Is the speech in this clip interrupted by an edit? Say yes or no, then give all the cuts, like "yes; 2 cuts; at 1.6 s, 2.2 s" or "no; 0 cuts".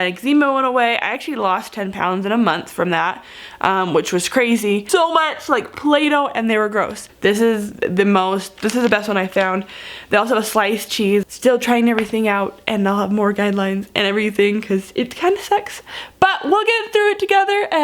yes; 3 cuts; at 4.8 s, 7.0 s, 11.2 s